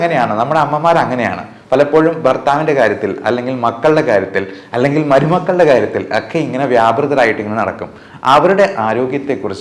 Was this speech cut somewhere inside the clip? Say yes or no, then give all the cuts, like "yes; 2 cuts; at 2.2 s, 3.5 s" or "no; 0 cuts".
no; 0 cuts